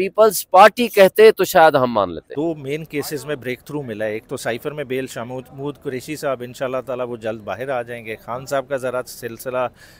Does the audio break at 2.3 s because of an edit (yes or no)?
yes